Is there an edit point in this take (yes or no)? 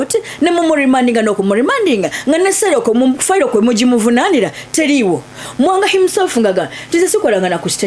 no